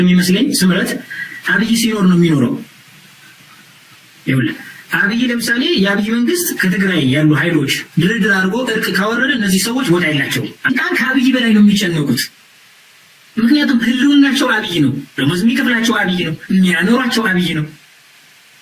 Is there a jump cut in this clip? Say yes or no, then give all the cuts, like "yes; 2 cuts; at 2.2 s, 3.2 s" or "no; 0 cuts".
yes; 1 cut; at 10.8 s